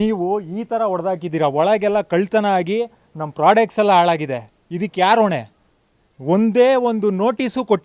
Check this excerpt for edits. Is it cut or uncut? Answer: uncut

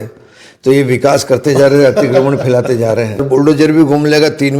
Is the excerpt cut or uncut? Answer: cut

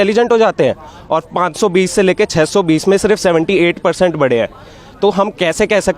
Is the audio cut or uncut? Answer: uncut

